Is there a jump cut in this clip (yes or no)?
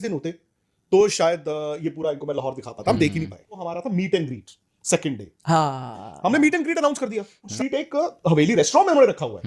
yes